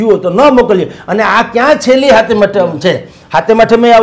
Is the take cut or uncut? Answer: uncut